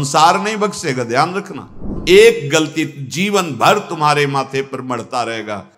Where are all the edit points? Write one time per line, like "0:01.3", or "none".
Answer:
0:01.9